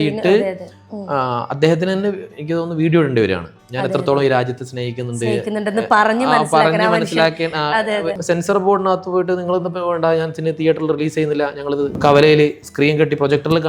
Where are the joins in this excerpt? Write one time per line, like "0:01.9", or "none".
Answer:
0:08.2
0:12.0